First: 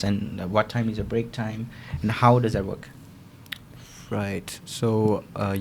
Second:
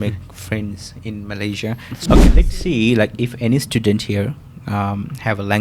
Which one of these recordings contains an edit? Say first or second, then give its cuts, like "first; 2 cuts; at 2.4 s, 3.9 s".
second; 1 cut; at 1.9 s